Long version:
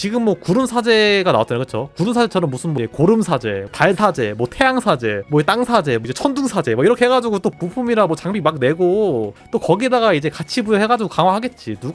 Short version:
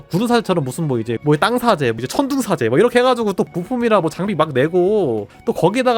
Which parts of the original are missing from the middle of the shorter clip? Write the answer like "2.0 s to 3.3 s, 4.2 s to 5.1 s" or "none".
2.9 s to 5.1 s